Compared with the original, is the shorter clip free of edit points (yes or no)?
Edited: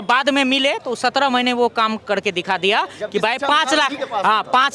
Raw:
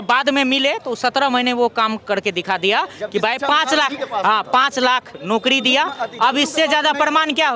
yes